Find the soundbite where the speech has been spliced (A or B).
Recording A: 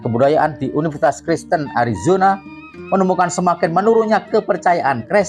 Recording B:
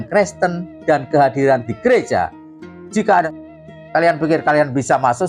B